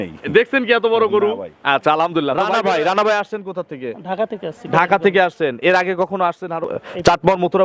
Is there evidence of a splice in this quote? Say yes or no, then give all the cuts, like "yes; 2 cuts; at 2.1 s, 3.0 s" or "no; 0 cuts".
yes; 2 cuts; at 2.4 s, 6.7 s